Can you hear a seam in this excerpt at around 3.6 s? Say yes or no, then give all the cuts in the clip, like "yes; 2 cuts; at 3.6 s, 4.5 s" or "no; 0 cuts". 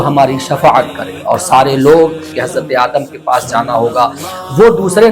no; 1 cut; at 2.3 s